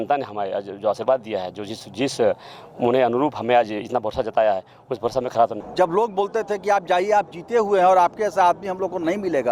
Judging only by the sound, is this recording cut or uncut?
cut